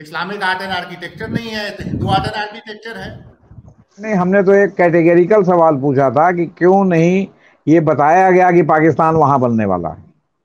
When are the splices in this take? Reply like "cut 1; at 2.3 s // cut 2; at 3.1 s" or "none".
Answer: cut 1; at 4.1 s